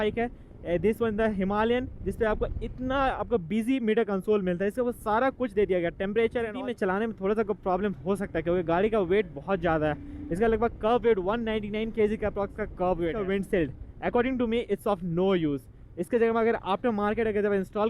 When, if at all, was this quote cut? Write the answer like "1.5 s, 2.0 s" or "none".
6.6 s, 13.1 s